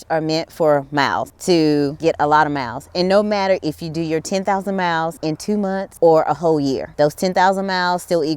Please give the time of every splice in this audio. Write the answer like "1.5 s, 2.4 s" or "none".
1.3 s, 2.0 s, 5.5 s, 6.8 s